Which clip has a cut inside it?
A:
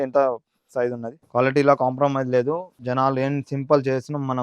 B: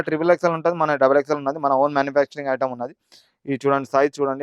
A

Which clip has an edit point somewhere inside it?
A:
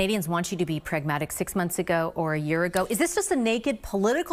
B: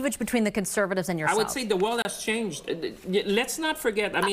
B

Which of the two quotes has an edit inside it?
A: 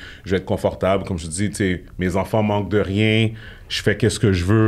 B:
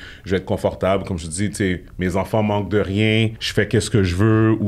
B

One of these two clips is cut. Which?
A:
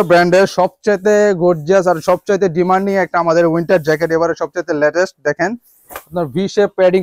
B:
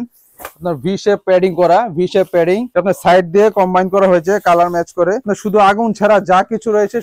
B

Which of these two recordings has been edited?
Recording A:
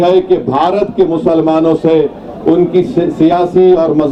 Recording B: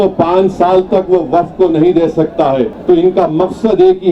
B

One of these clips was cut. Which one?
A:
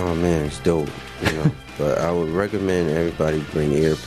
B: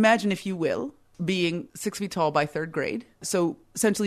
B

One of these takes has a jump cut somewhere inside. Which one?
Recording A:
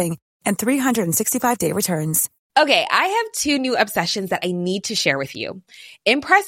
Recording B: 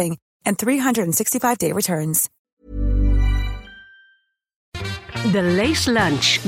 B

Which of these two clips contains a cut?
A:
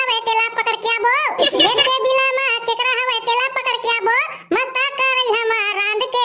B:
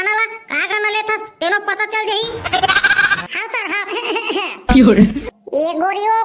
B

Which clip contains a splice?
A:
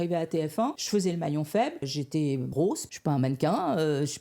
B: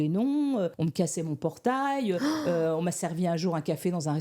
A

